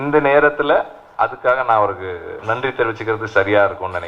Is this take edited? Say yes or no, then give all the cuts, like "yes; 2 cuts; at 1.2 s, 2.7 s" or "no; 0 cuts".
yes; 2 cuts; at 1.1 s, 2.4 s